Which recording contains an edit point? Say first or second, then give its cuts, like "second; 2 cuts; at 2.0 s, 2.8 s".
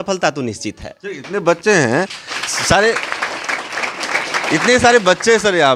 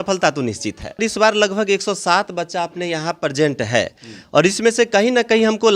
second; 1 cut; at 1.0 s